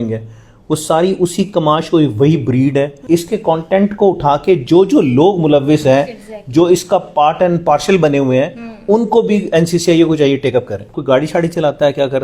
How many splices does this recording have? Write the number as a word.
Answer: two